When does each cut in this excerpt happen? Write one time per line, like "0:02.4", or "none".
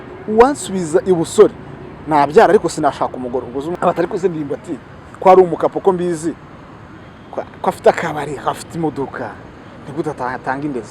0:03.7